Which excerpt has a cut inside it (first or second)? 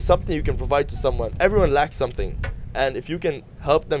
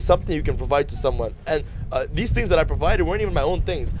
first